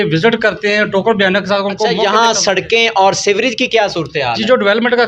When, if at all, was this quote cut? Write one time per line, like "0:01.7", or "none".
0:01.9